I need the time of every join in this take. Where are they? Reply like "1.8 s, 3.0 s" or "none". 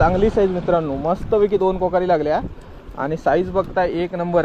none